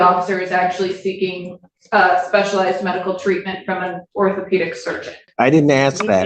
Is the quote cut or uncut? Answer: cut